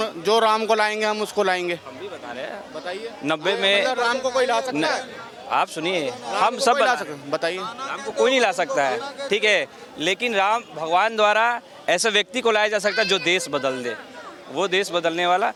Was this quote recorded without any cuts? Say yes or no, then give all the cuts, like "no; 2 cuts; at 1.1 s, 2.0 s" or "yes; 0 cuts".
yes; 0 cuts